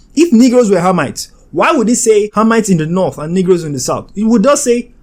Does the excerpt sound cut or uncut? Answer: uncut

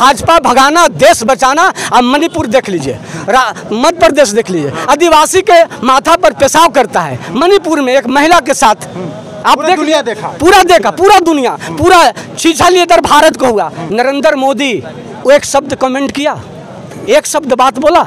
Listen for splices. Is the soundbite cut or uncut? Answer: uncut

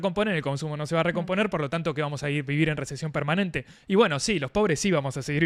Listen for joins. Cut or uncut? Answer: uncut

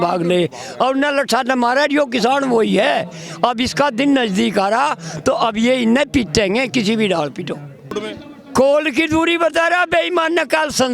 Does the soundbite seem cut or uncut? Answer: cut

